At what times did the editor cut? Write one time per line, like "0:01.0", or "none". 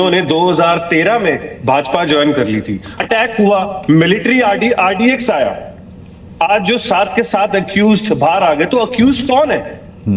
0:03.0

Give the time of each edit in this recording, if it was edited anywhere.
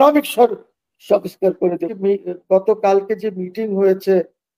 0:01.9

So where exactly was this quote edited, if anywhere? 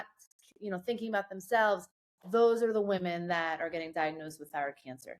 none

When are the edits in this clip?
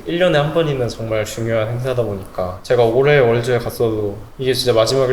0:02.6

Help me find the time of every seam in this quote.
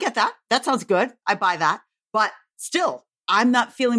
none

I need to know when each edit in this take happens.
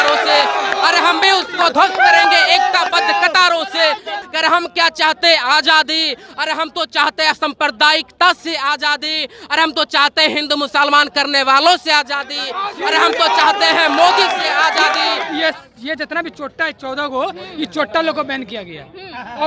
0:04.2
0:15.2

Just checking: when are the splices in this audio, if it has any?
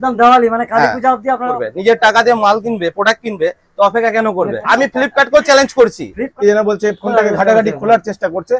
0:01.6
0:04.6
0:06.3

